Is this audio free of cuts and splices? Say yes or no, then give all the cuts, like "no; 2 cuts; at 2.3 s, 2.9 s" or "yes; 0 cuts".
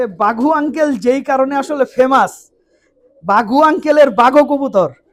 yes; 0 cuts